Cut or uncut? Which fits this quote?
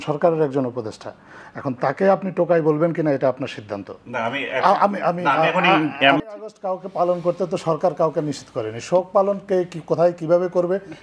cut